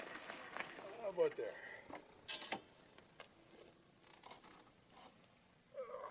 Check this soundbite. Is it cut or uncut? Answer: uncut